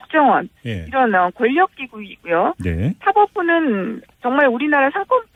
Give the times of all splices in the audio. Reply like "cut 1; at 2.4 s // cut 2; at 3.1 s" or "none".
none

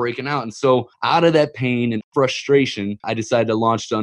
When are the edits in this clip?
cut 1; at 0.9 s // cut 2; at 2.1 s // cut 3; at 3.1 s

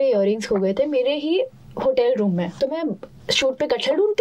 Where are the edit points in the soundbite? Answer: cut 1; at 2.6 s

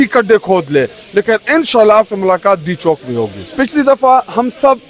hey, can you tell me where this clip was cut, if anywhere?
cut 1; at 3.4 s

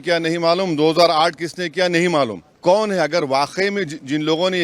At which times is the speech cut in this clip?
cut 1; at 2.5 s

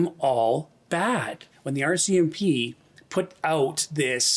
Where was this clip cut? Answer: cut 1; at 1.4 s

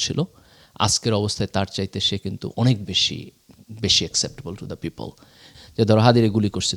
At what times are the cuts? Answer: cut 1; at 5.4 s

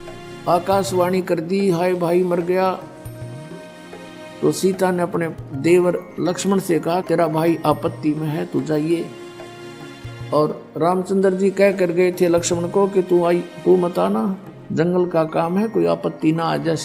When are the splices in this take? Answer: cut 1; at 3.0 s // cut 2; at 4.4 s

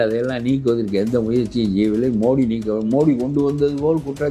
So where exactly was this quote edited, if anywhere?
none

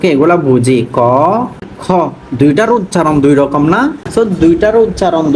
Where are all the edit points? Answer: cut 1; at 1.6 s // cut 2; at 4.0 s

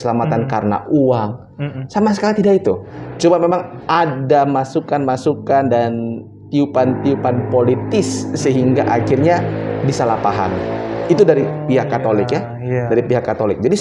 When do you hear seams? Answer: cut 1; at 3.0 s

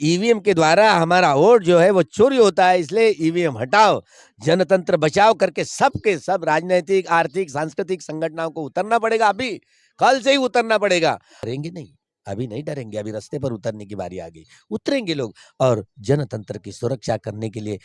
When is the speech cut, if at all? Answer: cut 1; at 11.5 s

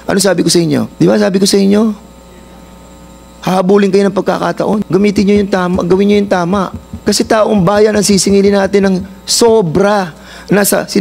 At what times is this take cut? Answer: cut 1; at 0.9 s // cut 2; at 4.8 s // cut 3; at 6.8 s

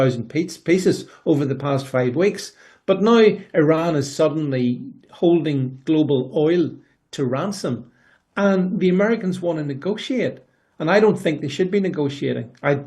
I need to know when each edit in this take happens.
none

